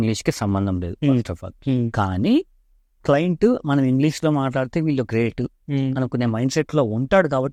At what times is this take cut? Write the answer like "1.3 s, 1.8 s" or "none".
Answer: none